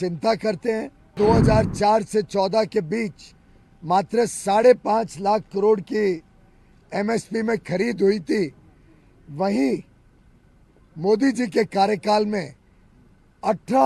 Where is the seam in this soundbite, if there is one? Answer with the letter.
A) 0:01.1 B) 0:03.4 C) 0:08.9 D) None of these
A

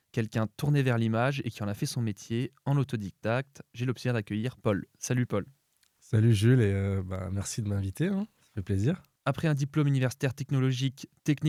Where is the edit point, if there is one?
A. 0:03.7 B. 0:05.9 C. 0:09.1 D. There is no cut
D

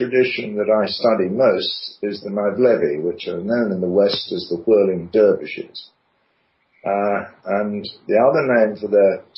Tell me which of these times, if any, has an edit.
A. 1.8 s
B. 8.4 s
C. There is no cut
B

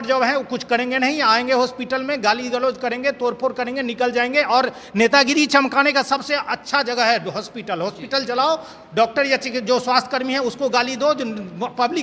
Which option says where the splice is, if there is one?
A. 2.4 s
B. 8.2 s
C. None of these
C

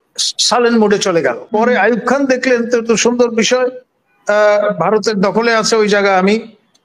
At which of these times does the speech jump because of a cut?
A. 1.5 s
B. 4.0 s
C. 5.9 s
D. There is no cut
A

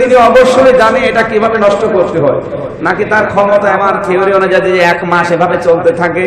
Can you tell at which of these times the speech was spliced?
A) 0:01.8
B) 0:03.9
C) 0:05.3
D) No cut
B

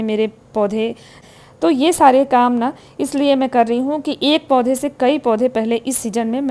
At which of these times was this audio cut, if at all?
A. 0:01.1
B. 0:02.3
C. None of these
A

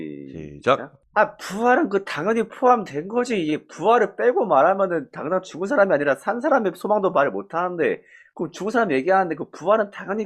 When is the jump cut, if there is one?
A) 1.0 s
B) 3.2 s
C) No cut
A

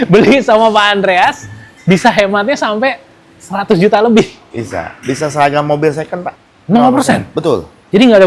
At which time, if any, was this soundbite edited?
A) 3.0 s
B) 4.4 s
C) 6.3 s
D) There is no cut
C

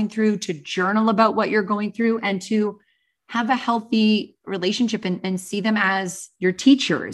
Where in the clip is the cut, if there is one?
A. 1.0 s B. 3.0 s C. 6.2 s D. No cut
C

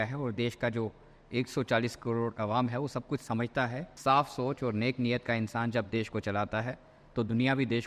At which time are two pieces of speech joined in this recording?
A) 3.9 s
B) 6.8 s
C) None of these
A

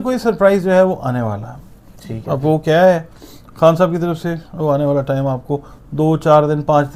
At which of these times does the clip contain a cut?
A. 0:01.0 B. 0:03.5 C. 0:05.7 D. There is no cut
D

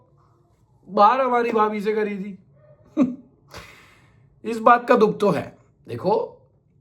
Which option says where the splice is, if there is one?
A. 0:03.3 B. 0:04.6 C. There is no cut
C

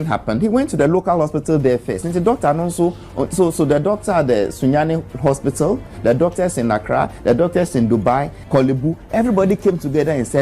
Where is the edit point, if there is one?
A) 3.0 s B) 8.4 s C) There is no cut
B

